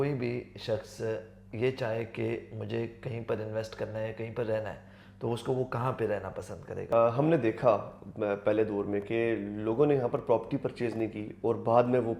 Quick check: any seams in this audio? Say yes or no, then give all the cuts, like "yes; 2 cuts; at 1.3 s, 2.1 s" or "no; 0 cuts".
yes; 1 cut; at 6.8 s